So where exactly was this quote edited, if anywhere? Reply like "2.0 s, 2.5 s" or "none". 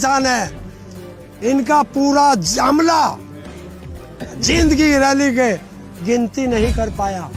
none

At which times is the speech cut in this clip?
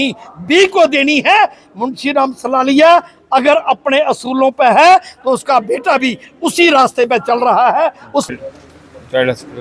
8.3 s

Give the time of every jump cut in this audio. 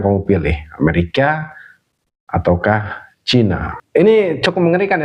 3.7 s

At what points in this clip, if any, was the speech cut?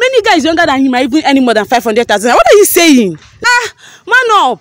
3.3 s

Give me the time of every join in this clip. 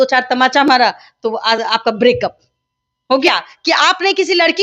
3.3 s

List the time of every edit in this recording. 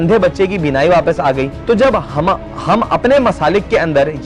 1.5 s

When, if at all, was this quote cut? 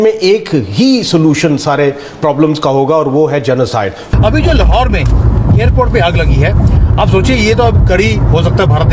4.0 s

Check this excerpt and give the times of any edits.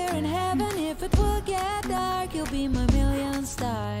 2.0 s

